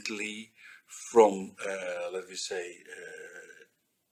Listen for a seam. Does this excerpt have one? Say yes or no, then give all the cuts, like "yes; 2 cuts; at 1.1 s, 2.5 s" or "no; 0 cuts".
no; 0 cuts